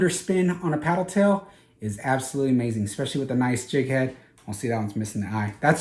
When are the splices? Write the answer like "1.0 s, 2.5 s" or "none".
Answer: none